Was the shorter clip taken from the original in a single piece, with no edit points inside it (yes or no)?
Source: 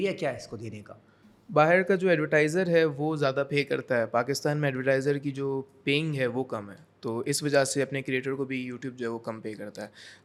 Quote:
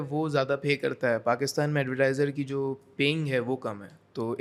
yes